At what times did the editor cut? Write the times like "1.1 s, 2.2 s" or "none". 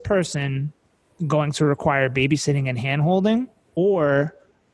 3.6 s